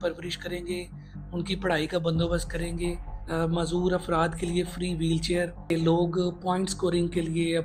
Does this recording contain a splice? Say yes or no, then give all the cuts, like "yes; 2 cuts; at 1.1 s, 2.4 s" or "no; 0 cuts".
yes; 2 cuts; at 3.1 s, 5.6 s